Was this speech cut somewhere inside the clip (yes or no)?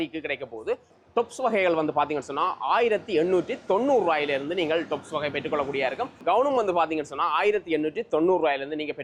yes